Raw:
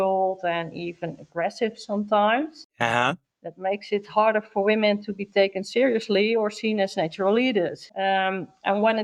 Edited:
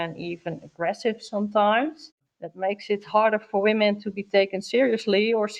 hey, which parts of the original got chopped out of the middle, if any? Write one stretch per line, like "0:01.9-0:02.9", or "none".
0:02.7-0:03.2